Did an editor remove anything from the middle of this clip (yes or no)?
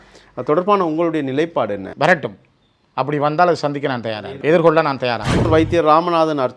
yes